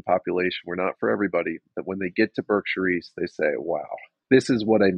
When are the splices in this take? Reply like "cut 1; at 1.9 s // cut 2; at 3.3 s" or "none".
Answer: cut 1; at 4.1 s